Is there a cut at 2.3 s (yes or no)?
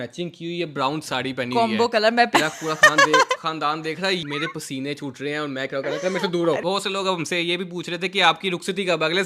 yes